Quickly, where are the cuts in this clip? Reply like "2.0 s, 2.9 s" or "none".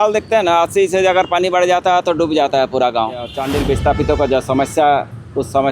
3.4 s